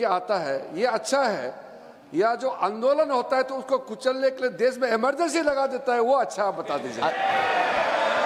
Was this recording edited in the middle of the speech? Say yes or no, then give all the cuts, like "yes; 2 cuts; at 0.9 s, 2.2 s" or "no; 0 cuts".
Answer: no; 0 cuts